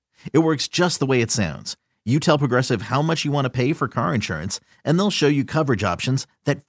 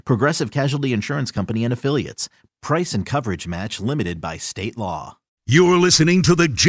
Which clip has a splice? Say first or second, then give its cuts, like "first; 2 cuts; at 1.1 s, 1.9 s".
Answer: second; 1 cut; at 5.4 s